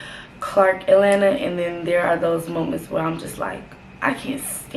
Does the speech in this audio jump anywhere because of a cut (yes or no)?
no